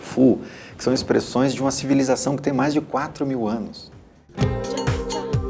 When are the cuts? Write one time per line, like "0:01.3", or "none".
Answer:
0:04.2